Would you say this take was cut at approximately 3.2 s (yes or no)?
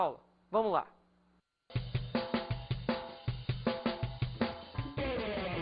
no